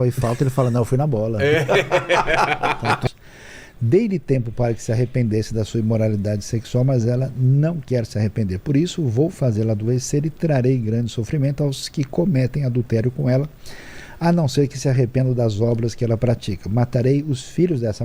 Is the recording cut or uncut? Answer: cut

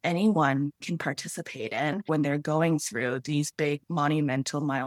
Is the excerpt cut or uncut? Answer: cut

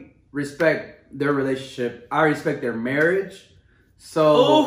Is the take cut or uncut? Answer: uncut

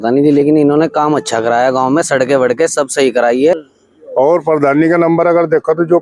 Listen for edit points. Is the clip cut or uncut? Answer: cut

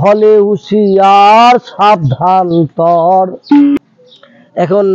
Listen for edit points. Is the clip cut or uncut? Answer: cut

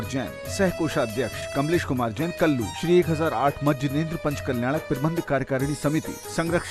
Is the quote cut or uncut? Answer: uncut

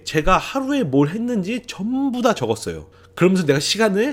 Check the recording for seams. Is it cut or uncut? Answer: uncut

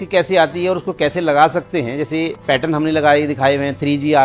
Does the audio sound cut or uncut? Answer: cut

